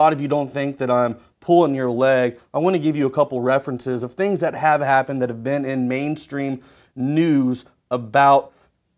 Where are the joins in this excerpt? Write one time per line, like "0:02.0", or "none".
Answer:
0:03.1